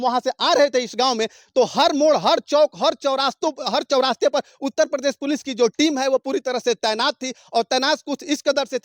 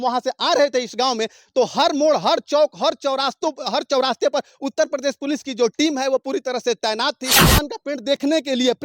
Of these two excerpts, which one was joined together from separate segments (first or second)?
second